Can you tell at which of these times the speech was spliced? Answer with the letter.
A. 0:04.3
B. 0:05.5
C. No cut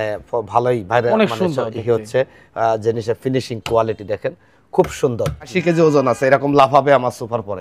B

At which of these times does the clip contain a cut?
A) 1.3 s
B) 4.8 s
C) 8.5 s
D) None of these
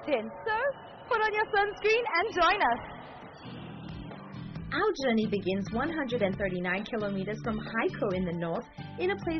A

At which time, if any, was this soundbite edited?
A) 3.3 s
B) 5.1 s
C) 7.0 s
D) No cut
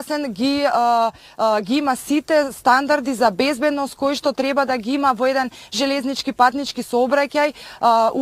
A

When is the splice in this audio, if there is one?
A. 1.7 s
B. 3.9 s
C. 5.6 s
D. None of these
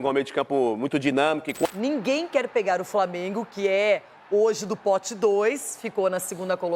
A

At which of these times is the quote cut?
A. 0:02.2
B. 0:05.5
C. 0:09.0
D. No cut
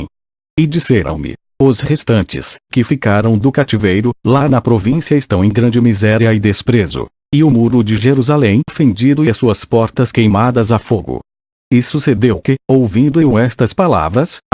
D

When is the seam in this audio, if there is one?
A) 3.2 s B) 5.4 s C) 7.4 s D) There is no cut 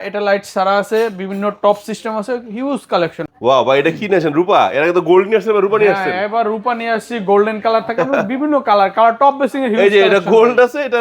A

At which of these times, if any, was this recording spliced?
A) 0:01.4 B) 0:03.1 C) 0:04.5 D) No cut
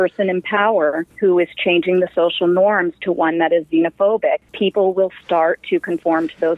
C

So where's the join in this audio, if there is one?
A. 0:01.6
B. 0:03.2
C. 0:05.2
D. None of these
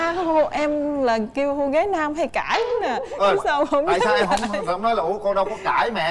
D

